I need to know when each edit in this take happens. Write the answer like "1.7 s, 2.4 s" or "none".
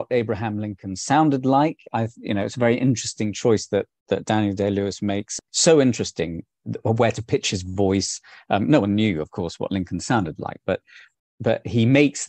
5.4 s